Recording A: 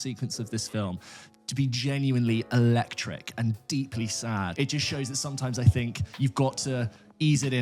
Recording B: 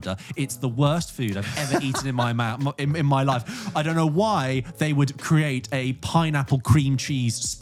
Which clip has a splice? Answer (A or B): A